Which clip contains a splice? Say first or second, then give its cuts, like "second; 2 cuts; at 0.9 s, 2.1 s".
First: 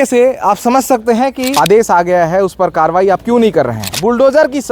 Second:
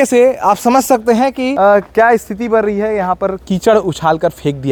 first; 2 cuts; at 1.5 s, 3.8 s